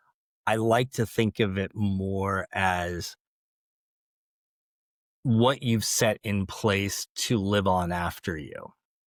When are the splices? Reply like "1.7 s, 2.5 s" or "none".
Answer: none